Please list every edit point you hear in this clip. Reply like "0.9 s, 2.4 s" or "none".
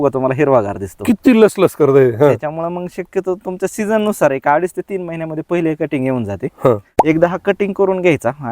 6.9 s